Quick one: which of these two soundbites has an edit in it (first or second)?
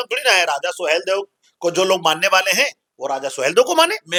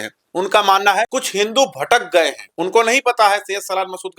second